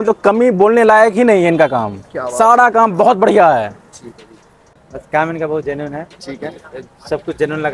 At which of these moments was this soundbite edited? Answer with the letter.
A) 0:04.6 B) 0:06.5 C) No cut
A